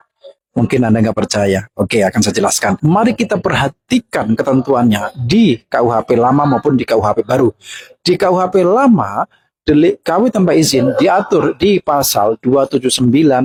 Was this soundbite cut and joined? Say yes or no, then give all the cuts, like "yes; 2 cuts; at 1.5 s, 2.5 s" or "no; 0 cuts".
no; 0 cuts